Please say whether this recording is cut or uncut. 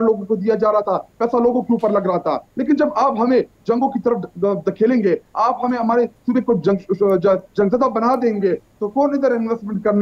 uncut